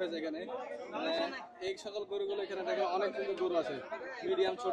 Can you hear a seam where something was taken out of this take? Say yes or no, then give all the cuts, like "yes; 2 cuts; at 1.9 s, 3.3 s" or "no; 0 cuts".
no; 0 cuts